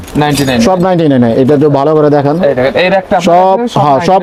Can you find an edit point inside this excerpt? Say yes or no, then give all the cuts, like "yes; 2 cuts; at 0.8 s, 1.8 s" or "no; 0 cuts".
no; 0 cuts